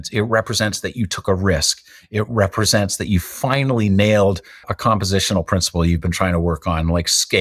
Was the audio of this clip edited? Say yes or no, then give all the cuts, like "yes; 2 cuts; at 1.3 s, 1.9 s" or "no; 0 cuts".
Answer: no; 0 cuts